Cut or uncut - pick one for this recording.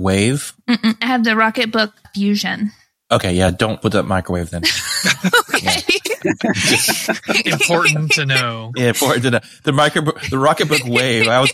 cut